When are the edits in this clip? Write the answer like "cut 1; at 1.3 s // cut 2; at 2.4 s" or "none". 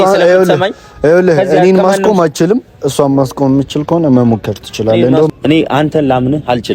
cut 1; at 5.3 s